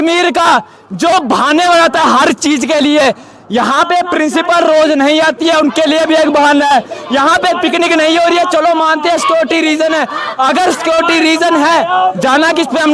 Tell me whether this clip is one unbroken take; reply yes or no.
yes